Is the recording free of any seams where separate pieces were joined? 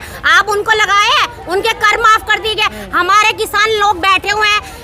yes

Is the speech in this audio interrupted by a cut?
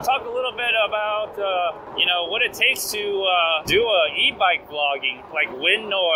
yes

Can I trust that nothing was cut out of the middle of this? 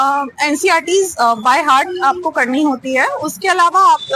yes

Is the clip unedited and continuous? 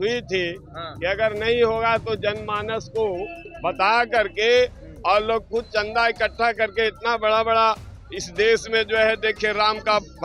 yes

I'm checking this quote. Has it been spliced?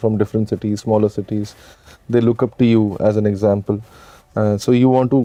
no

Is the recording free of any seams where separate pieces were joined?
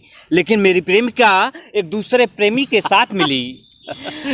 yes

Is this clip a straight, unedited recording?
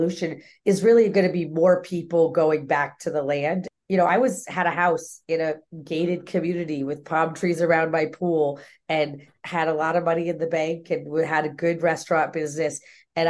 no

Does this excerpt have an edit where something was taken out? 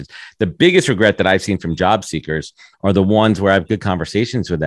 no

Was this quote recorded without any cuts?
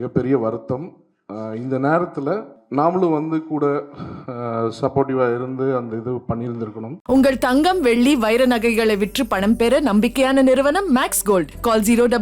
no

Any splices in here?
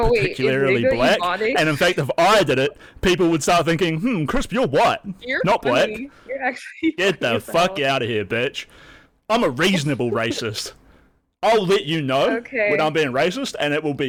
no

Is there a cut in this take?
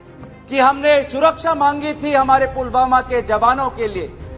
no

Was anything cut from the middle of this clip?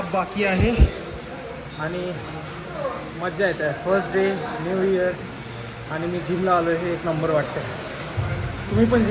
no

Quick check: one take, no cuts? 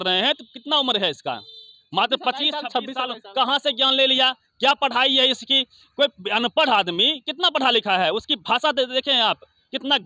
yes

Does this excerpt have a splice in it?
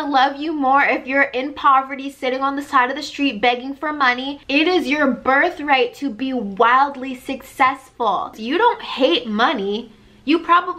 yes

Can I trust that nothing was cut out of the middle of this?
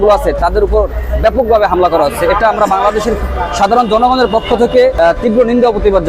no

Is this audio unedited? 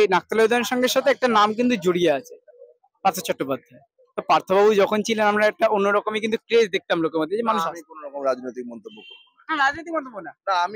yes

